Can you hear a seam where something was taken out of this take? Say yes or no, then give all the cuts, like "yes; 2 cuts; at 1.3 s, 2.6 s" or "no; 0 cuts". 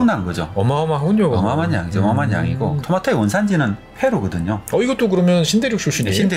yes; 2 cuts; at 2.8 s, 3.8 s